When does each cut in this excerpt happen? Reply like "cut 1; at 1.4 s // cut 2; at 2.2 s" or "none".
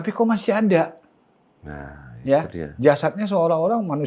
none